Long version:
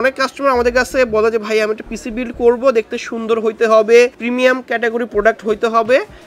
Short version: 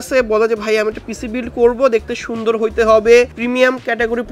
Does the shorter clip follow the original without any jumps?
yes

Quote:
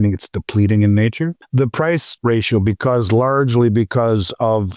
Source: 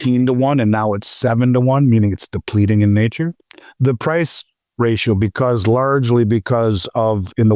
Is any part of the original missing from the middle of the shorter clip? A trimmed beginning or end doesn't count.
yes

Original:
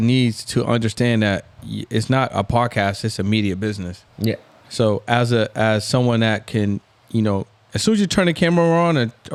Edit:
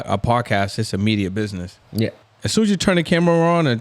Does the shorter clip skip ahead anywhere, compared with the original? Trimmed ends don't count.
yes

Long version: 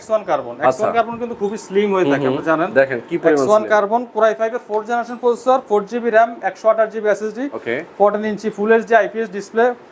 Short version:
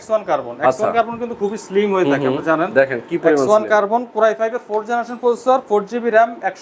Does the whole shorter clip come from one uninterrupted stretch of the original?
yes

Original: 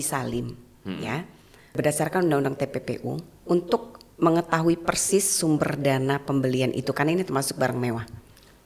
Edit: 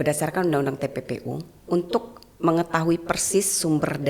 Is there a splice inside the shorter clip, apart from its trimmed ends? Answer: no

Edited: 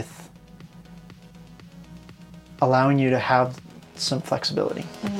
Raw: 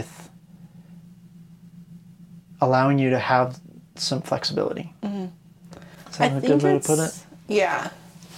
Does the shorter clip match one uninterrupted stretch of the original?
yes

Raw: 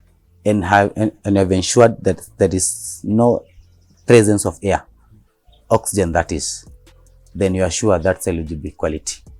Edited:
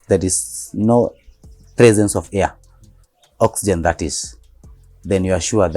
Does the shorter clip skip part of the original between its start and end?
no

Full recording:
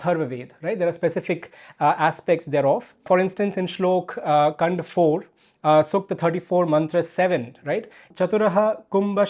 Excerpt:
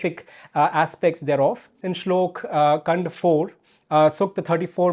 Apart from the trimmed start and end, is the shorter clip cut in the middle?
yes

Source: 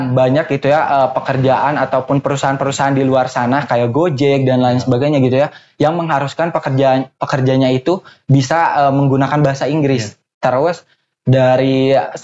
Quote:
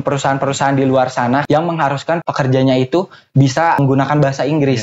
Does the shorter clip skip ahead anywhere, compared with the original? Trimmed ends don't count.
yes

